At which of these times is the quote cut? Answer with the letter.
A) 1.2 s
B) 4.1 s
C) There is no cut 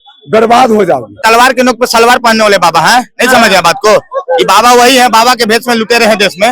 A